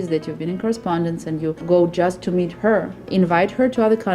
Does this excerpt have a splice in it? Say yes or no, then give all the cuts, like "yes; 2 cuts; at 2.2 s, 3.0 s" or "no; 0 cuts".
yes; 2 cuts; at 1.6 s, 3.1 s